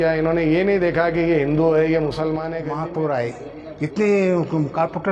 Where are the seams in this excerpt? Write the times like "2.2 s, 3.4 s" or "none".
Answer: 2.5 s